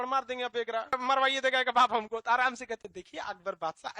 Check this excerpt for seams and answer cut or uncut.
cut